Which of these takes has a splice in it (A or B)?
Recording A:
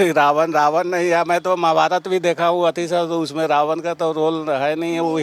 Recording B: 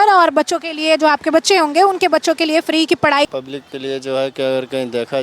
B